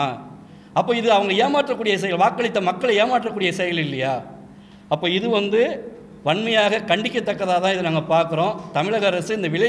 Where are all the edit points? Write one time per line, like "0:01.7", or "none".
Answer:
none